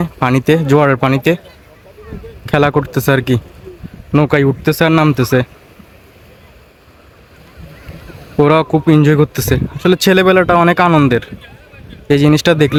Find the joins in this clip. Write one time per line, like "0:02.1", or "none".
none